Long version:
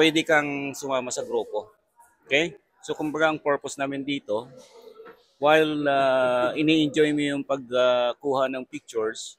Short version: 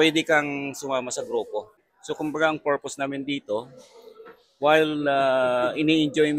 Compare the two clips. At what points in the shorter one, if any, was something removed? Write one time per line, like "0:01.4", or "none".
0:01.9

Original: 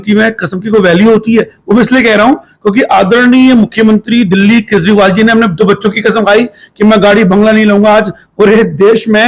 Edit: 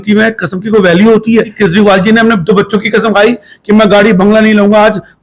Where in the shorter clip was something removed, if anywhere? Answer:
0:01.5

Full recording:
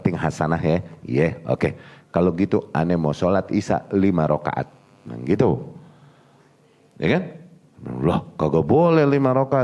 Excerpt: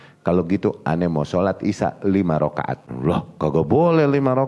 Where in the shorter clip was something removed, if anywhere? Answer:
0:02.8

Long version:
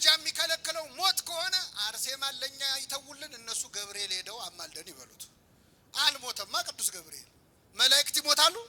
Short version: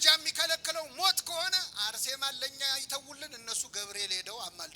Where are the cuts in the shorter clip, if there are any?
none

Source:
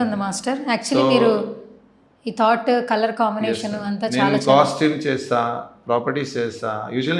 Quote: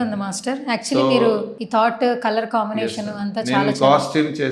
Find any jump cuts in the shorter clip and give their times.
0:01.5

